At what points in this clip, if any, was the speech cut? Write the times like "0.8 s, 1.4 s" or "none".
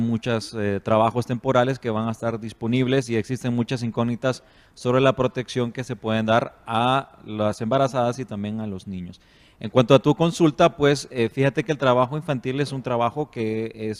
none